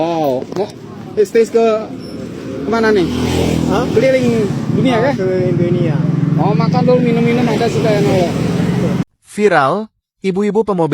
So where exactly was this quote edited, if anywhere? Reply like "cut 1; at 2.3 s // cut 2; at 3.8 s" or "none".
cut 1; at 9.0 s